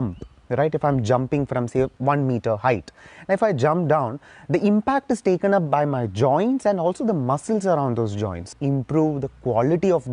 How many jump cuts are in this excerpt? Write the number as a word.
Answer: two